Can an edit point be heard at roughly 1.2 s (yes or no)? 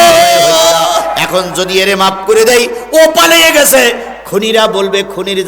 yes